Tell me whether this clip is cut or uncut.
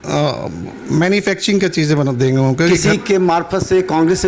cut